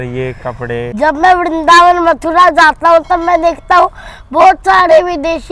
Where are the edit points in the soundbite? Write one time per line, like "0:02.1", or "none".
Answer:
0:00.9